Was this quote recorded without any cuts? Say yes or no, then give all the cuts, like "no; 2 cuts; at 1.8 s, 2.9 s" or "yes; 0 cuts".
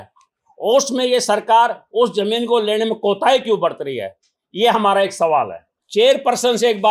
no; 1 cut; at 5.8 s